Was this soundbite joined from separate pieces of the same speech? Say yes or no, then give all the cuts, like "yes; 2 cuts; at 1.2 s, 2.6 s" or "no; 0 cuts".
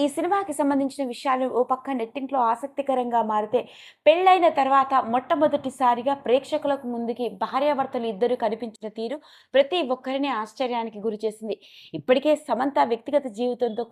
no; 0 cuts